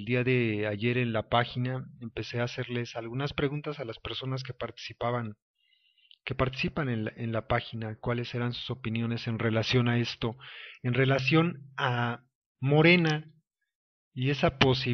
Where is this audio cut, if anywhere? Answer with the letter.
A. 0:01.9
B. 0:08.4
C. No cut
B